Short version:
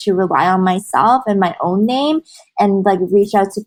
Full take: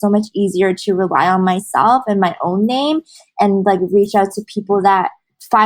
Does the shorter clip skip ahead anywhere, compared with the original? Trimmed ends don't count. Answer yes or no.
no